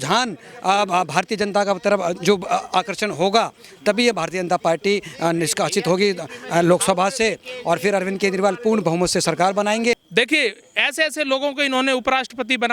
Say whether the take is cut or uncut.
cut